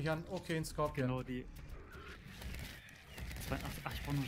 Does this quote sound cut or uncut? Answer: uncut